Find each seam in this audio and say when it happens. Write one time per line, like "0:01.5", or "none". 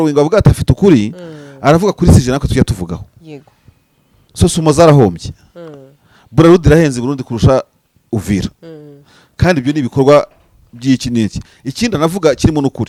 none